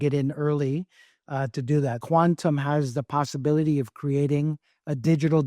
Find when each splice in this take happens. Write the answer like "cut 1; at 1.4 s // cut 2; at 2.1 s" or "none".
cut 1; at 2.0 s